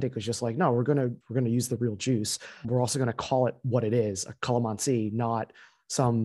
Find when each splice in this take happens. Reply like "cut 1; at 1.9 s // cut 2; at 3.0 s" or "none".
cut 1; at 1.2 s